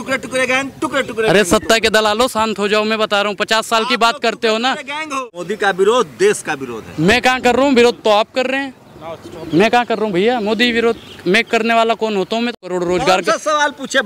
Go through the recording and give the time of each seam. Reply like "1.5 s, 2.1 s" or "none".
5.4 s, 12.6 s